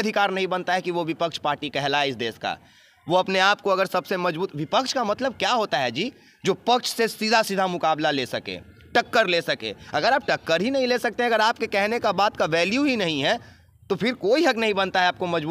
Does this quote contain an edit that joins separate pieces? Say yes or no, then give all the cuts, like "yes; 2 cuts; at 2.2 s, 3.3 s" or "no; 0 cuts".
no; 0 cuts